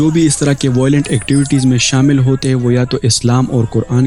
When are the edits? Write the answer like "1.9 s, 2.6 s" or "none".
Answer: none